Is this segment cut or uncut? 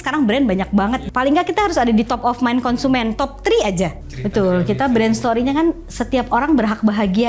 cut